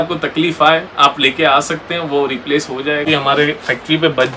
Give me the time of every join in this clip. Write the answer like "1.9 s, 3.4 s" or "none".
3.1 s